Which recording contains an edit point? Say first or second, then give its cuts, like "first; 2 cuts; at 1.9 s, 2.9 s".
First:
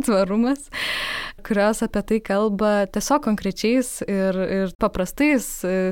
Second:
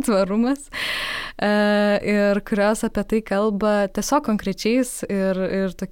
first; 2 cuts; at 1.4 s, 4.8 s